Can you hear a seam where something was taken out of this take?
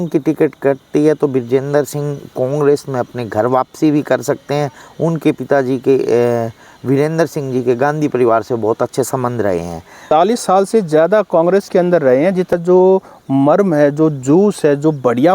yes; 2 cuts; at 10.0 s, 12.5 s

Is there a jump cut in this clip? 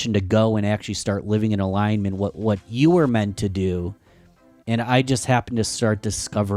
no; 0 cuts

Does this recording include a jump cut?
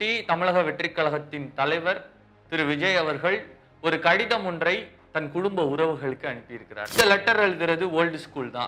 yes; 1 cut; at 6.9 s

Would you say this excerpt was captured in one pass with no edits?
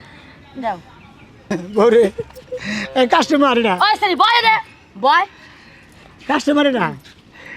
no; 1 cut; at 1.4 s

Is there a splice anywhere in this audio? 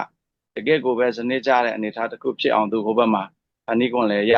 no; 0 cuts

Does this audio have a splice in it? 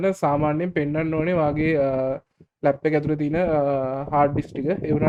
no; 0 cuts

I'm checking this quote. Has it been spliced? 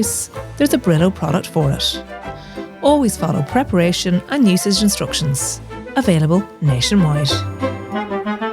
yes; 1 cut; at 7.2 s

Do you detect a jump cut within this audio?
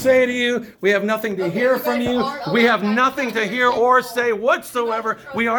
no; 0 cuts

